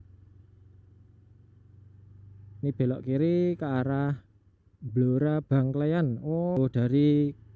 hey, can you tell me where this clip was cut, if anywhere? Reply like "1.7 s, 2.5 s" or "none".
6.6 s